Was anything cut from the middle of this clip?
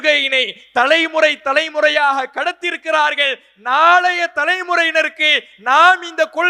no; 0 cuts

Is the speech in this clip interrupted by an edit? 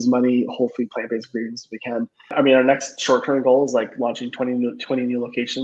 yes; 1 cut; at 2.3 s

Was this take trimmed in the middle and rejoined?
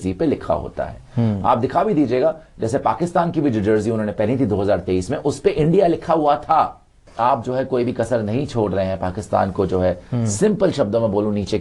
no; 0 cuts

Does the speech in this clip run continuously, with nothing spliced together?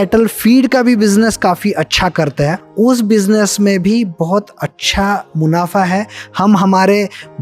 no; 1 cut; at 2.6 s

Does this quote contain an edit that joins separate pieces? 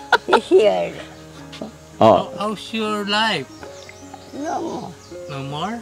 no; 0 cuts

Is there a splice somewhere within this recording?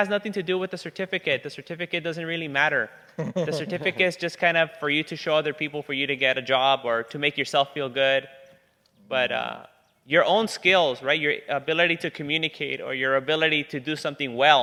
no; 0 cuts

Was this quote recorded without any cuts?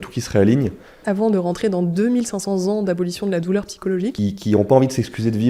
no; 2 cuts; at 1.0 s, 4.2 s

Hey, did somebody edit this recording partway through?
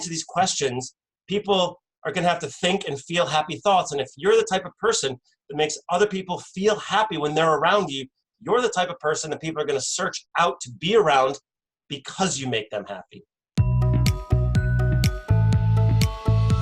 yes; 1 cut; at 13.4 s

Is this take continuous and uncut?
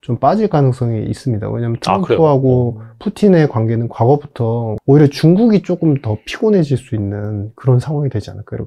no; 1 cut; at 4.7 s

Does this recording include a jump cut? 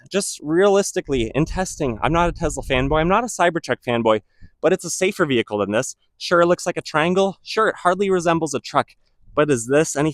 no; 0 cuts

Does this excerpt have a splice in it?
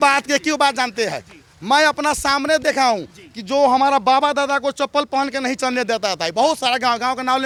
no; 0 cuts

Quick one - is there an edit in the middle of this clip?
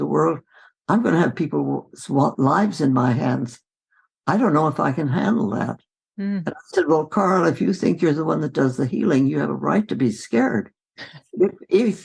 no; 0 cuts

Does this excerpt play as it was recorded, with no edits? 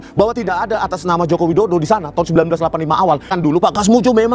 no; 1 cut; at 3.3 s

